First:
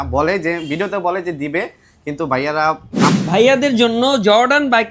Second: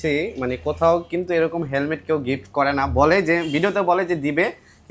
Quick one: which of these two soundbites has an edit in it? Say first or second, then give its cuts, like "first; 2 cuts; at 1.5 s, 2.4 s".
first; 1 cut; at 3.2 s